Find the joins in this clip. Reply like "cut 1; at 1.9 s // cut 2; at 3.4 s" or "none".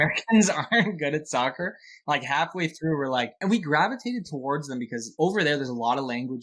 cut 1; at 3.3 s // cut 2; at 5.0 s